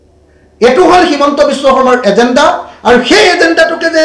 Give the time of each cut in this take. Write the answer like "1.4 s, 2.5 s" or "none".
none